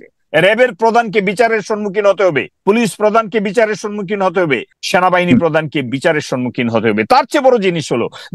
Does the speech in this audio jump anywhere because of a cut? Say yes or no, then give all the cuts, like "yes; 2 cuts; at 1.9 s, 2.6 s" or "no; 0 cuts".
yes; 2 cuts; at 2.5 s, 4.7 s